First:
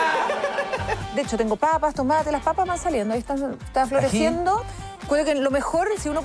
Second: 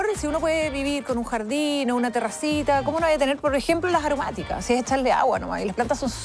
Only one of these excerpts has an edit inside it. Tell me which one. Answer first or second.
first